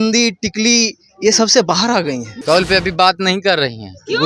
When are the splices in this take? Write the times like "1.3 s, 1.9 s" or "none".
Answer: 2.3 s